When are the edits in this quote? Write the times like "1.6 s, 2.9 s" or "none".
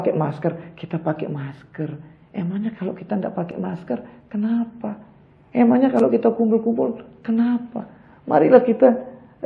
none